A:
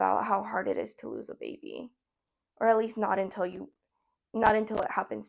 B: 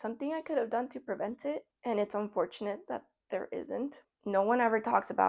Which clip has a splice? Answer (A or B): B